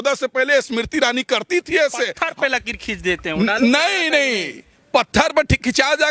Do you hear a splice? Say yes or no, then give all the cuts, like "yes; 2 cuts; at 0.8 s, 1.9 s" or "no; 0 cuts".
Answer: yes; 1 cut; at 2.2 s